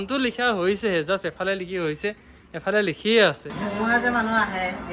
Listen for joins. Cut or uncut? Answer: cut